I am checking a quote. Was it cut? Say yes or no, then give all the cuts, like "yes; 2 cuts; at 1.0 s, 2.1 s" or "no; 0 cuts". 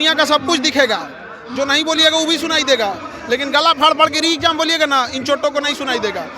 no; 0 cuts